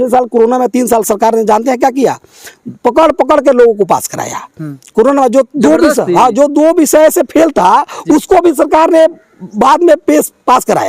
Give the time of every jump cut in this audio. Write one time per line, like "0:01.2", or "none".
none